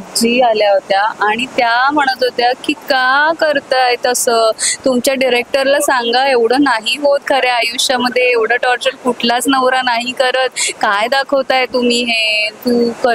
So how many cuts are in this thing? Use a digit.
0